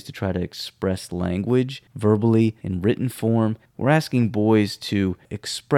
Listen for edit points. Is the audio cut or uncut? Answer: cut